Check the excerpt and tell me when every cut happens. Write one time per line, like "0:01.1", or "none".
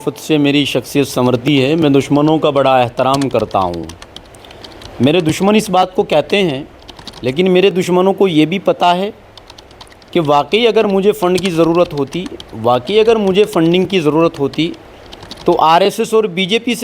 none